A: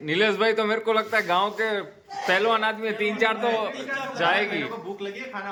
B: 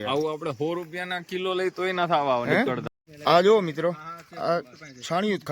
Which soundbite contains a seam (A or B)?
B